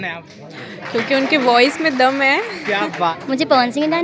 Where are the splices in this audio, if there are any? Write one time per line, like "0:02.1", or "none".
0:03.1